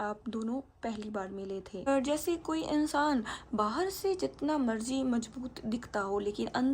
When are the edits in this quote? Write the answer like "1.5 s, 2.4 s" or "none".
1.9 s